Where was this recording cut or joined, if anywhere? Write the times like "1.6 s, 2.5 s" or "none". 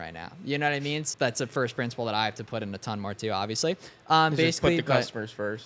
1.1 s